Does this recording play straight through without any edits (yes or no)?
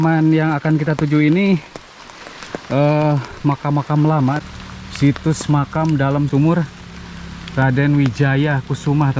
no